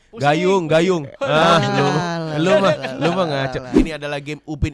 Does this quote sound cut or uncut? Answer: cut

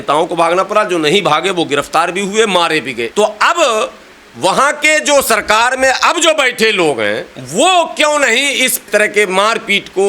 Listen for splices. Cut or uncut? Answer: cut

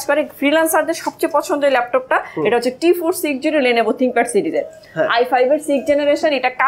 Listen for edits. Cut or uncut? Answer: uncut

